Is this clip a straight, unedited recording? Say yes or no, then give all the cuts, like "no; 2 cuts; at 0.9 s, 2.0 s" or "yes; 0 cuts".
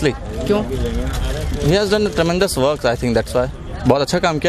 yes; 0 cuts